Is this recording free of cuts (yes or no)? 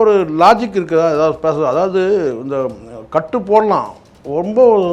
yes